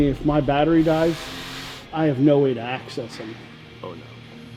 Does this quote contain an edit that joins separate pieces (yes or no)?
yes